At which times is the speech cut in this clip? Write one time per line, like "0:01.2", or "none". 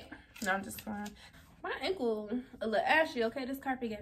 0:01.3